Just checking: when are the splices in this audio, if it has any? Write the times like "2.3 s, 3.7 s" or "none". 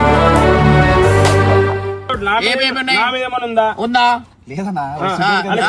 2.1 s